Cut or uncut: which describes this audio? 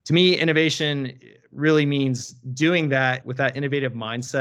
cut